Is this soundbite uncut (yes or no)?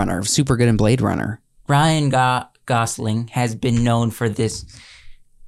no